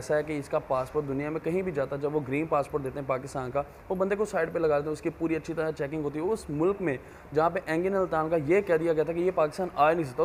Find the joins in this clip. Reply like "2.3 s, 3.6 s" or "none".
none